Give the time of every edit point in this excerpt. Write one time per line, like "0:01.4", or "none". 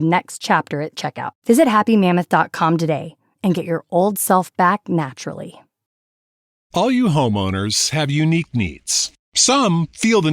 0:06.0